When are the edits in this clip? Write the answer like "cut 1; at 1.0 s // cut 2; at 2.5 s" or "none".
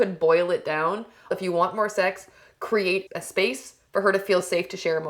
cut 1; at 1.4 s // cut 2; at 3.2 s